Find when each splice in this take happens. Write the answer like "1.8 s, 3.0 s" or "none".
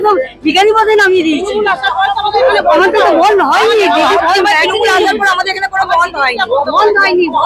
none